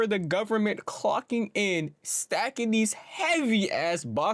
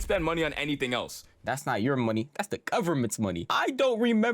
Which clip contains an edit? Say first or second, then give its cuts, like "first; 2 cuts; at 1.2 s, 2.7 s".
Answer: second; 1 cut; at 1.4 s